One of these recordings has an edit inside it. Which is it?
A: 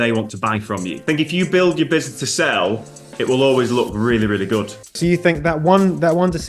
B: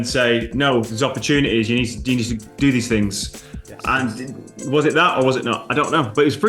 A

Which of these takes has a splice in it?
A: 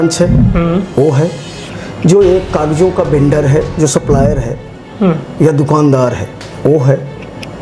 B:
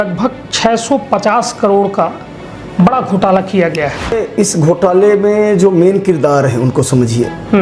B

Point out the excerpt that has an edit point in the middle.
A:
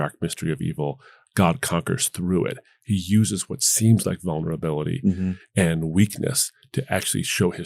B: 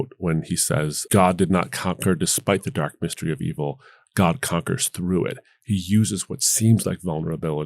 B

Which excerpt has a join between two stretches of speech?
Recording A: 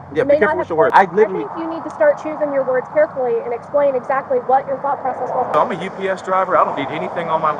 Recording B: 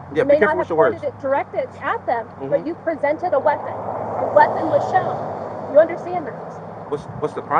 A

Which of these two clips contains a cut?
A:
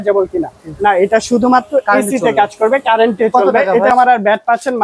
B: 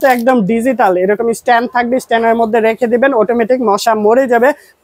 A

